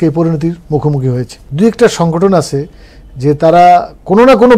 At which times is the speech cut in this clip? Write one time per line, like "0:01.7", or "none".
0:01.4